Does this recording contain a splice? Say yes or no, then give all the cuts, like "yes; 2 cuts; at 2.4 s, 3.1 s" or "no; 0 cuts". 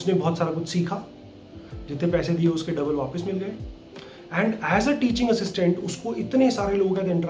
no; 0 cuts